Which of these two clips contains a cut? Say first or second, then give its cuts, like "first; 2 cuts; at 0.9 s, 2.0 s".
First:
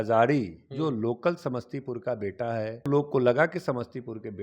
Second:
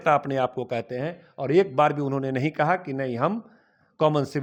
first; 1 cut; at 2.9 s